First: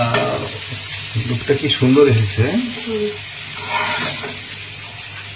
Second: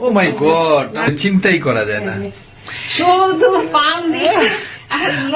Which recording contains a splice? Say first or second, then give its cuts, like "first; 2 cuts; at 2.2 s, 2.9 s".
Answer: second; 1 cut; at 1.1 s